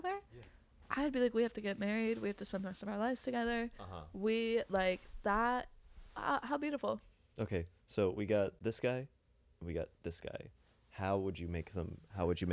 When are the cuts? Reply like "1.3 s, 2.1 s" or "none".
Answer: none